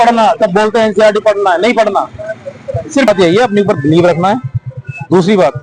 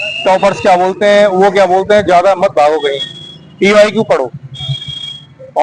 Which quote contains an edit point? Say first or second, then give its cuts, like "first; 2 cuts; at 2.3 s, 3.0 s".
first; 1 cut; at 3.1 s